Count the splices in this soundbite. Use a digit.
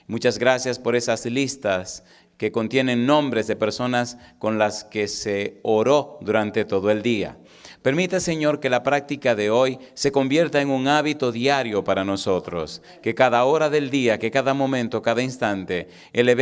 0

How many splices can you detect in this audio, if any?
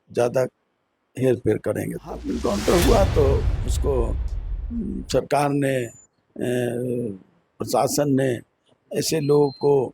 1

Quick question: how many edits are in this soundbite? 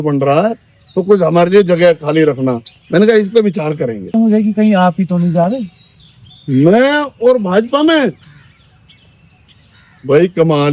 1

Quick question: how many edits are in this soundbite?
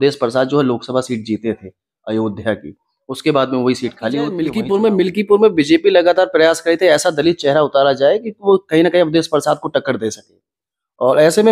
1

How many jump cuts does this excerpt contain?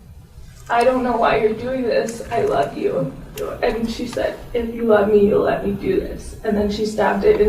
1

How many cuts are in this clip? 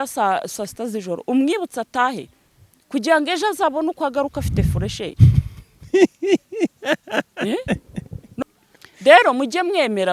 1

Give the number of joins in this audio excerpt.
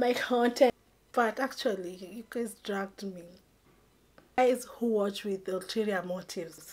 2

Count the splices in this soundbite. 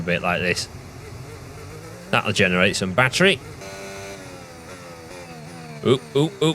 1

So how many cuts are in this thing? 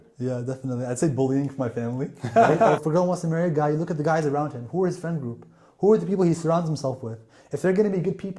1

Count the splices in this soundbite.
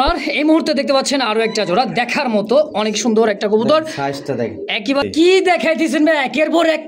1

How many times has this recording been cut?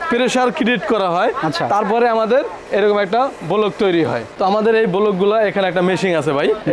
1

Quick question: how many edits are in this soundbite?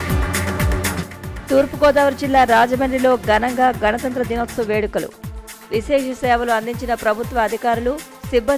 1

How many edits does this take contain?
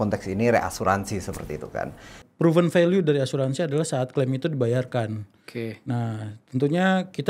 1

